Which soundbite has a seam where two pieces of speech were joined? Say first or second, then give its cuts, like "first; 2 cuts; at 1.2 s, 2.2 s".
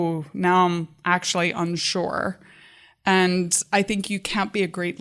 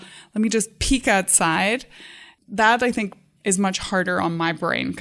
second; 1 cut; at 3.3 s